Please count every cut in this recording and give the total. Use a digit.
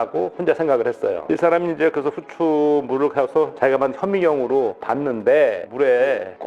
2